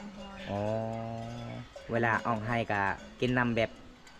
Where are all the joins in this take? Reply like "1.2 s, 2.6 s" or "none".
none